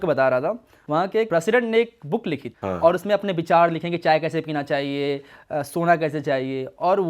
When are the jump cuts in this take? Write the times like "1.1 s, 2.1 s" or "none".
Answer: 1.0 s, 2.5 s